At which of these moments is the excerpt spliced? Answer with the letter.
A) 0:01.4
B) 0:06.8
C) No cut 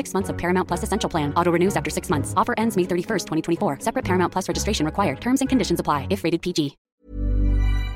B